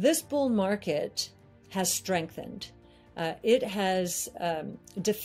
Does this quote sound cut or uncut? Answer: uncut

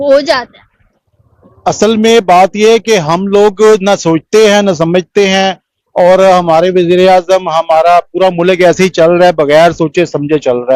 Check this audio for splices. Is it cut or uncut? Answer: uncut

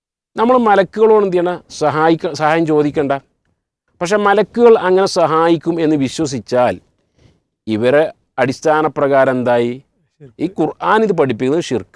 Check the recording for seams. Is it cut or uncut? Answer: uncut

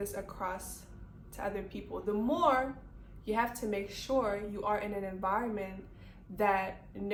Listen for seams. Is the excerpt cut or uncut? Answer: uncut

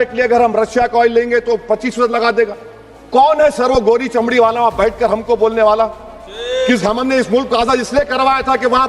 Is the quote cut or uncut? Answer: uncut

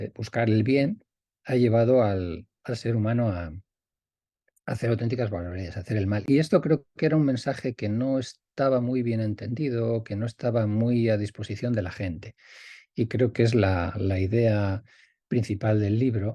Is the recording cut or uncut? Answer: uncut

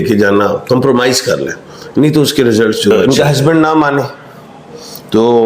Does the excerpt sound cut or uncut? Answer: cut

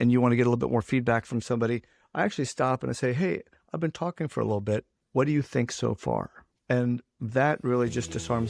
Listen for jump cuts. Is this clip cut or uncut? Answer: uncut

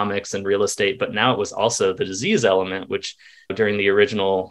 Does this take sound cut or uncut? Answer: uncut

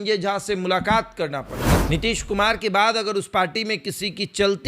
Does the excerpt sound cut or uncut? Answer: cut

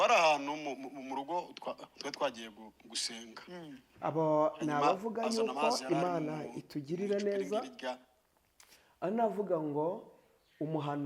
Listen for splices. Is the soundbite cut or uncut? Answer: uncut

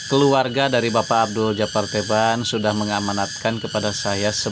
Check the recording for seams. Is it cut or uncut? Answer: uncut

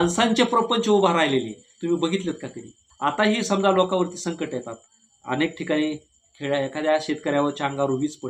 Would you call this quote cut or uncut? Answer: uncut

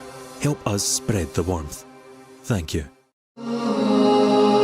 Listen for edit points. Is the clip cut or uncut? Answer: cut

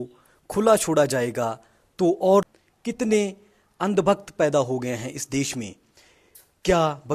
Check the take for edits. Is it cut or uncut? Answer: cut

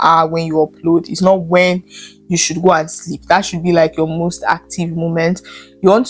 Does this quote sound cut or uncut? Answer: uncut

